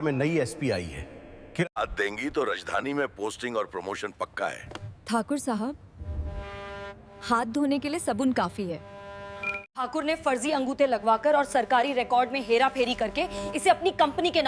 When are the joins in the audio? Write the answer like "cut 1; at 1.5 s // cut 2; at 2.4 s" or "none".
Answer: cut 1; at 1.7 s // cut 2; at 9.6 s